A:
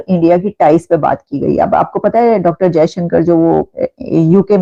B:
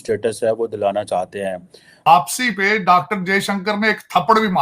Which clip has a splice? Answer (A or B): B